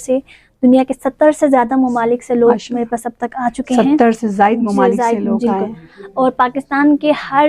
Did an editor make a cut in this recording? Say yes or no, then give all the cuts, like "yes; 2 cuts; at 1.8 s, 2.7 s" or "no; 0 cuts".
no; 0 cuts